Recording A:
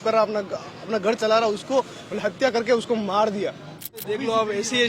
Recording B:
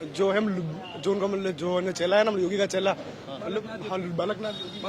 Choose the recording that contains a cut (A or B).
A